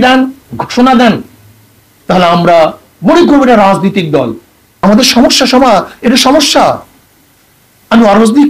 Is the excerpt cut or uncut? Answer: cut